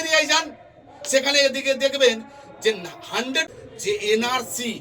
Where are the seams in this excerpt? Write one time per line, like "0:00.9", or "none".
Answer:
0:03.4